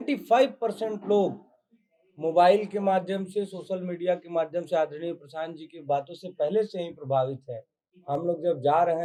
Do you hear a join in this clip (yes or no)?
no